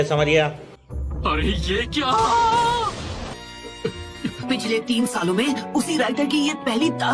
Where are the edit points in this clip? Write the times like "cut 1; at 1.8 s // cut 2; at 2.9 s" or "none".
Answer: cut 1; at 3.4 s